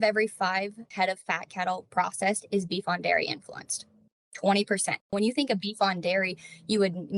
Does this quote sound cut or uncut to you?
cut